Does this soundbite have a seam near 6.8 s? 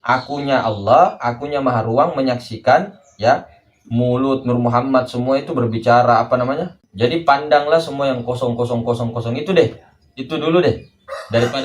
yes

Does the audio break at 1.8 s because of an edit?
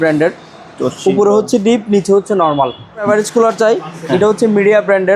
no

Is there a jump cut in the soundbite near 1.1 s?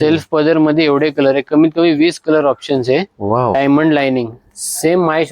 no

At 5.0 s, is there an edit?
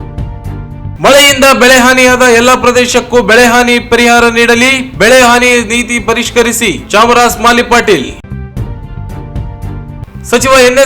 no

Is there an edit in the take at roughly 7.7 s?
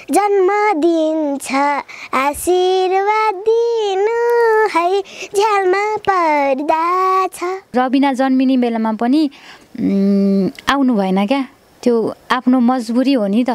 yes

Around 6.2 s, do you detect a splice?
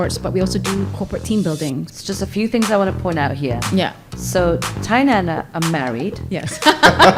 no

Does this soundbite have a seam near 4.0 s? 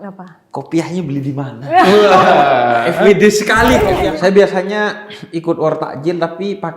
yes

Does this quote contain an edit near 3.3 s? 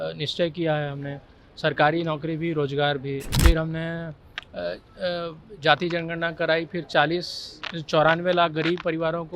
yes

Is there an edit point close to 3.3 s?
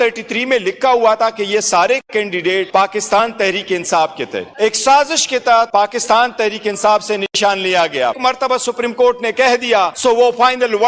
no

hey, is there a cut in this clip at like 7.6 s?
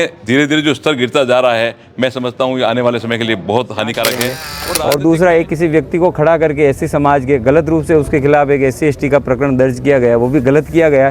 no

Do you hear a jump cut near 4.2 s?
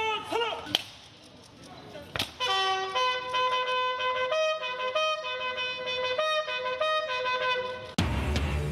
no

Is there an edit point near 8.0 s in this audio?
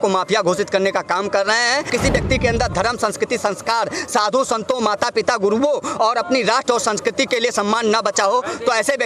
no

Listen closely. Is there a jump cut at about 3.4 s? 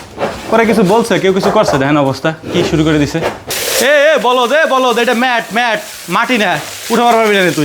yes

